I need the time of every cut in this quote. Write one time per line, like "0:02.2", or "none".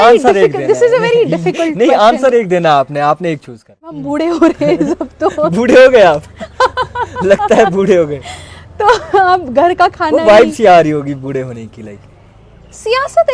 0:04.0